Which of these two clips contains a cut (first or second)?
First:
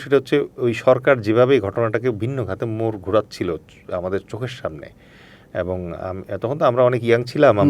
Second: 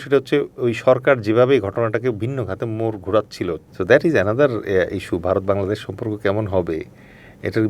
second